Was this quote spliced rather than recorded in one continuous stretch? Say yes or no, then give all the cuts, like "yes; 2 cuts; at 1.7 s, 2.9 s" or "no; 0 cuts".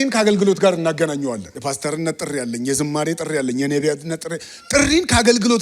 yes; 1 cut; at 1.5 s